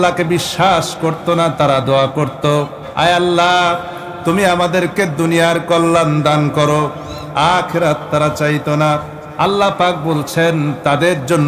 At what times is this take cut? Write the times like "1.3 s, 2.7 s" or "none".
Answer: 2.8 s, 9.2 s